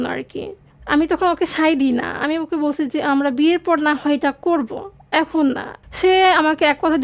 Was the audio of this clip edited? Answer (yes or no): yes